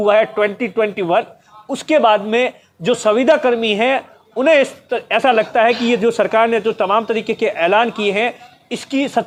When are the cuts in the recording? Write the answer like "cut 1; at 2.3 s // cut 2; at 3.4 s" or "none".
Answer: none